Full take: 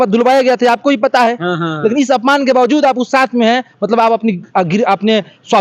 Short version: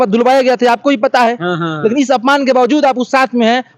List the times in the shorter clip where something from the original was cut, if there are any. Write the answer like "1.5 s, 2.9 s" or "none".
none